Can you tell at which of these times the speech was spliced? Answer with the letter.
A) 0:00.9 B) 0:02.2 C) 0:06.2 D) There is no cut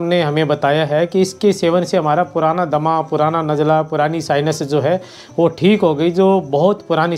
D